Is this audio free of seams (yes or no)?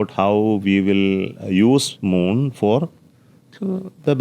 yes